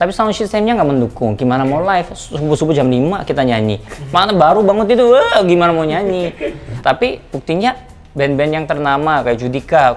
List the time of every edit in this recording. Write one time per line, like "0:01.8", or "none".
none